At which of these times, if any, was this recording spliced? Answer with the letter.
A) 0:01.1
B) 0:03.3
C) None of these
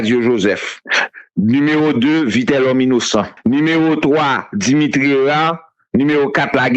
B